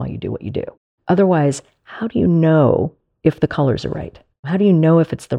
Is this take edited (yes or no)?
yes